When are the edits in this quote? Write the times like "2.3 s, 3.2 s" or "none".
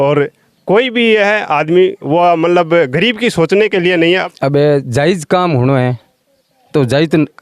4.2 s